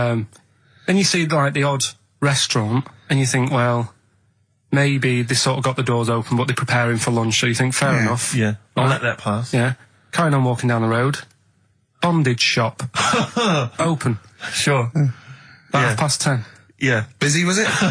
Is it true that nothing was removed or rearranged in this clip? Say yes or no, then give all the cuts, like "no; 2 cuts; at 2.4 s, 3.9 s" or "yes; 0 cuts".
yes; 0 cuts